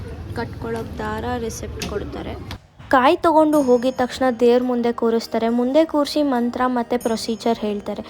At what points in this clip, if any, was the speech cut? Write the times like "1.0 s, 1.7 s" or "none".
2.7 s